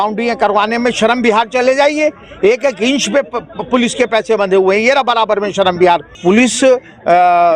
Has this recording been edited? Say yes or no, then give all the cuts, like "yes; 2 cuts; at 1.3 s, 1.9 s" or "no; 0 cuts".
yes; 1 cut; at 6.2 s